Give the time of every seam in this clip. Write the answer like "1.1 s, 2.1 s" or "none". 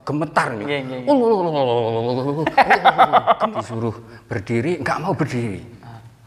3.5 s